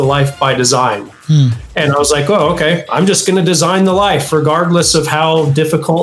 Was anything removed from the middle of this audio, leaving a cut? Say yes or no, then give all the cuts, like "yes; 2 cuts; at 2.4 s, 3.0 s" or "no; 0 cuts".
no; 0 cuts